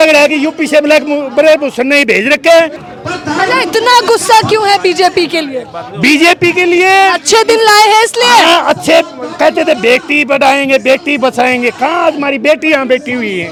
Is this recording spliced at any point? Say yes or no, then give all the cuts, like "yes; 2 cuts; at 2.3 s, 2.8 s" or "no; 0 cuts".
no; 0 cuts